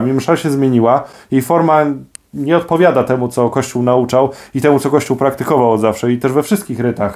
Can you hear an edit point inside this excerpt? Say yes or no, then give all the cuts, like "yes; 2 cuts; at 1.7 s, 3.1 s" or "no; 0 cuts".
no; 0 cuts